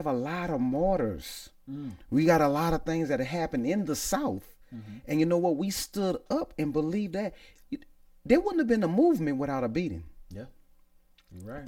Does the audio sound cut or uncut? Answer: uncut